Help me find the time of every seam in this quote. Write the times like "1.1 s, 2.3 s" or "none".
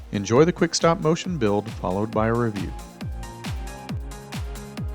2.7 s